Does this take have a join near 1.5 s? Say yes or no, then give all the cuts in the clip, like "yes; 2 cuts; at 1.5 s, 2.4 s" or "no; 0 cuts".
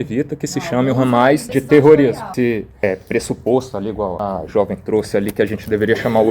yes; 3 cuts; at 1.5 s, 2.3 s, 4.2 s